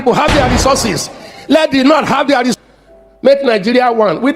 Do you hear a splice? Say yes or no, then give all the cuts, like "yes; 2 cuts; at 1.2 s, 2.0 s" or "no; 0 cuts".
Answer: yes; 1 cut; at 2.5 s